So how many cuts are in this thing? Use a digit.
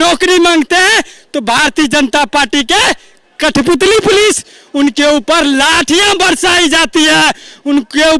0